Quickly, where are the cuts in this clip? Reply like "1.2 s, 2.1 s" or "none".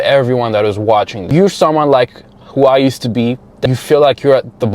1.2 s, 3.6 s

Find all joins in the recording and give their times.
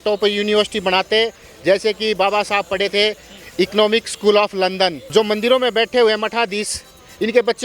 5.0 s

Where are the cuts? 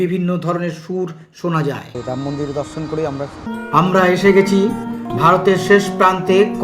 1.9 s, 3.5 s

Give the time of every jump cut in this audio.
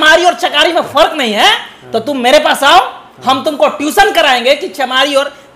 none

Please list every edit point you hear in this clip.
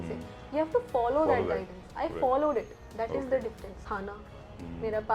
3.8 s

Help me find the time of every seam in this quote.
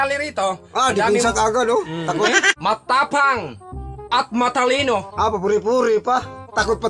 2.5 s

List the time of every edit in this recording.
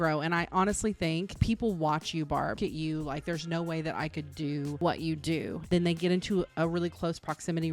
2.6 s, 4.8 s, 5.7 s

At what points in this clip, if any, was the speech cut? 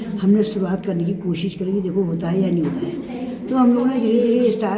3.2 s

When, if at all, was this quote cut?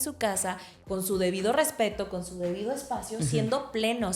none

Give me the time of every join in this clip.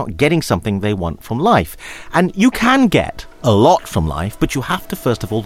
3.2 s

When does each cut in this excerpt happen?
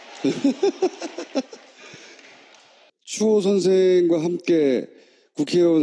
none

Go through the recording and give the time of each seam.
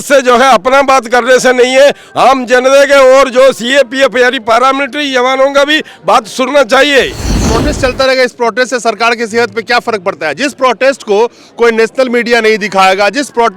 7.4 s

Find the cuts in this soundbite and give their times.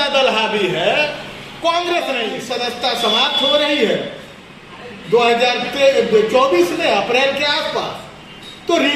2.4 s

